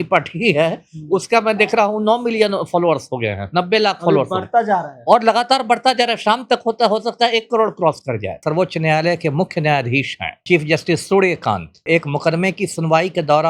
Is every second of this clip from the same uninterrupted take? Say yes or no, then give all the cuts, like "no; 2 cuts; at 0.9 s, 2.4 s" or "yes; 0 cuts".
no; 3 cuts; at 8.4 s, 10.4 s, 11.8 s